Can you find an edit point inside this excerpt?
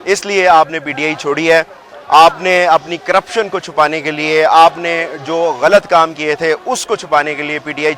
no; 0 cuts

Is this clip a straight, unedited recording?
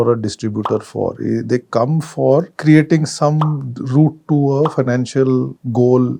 yes; 0 cuts

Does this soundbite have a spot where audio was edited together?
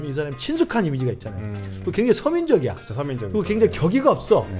no; 0 cuts

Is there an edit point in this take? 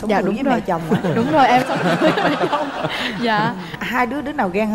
no; 0 cuts

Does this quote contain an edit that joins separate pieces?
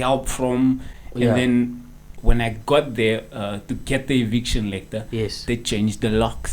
yes; 1 cut; at 2.2 s

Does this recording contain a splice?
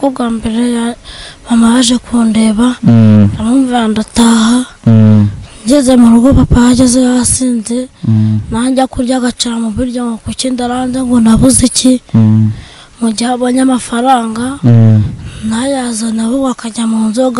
no; 0 cuts

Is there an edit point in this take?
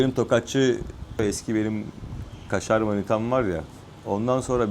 yes; 1 cut; at 1.2 s

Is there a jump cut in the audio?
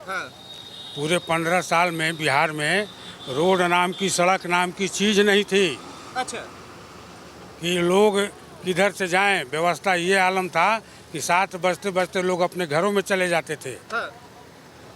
no; 0 cuts

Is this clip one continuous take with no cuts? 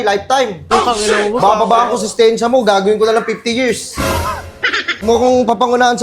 no; 1 cut; at 5.0 s

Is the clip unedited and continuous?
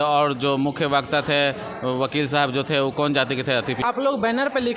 no; 1 cut; at 3.8 s

